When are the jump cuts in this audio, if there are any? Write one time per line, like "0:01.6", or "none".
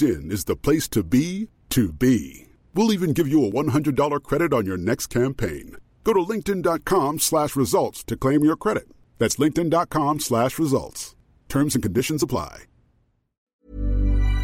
0:13.5